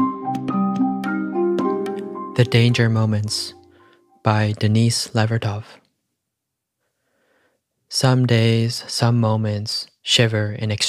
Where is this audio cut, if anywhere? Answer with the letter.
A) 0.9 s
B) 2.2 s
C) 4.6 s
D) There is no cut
B